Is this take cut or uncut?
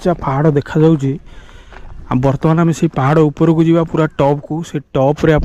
uncut